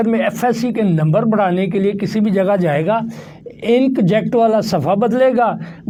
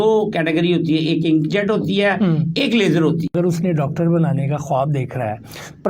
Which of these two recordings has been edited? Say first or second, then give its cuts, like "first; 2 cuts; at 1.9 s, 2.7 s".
second; 1 cut; at 3.3 s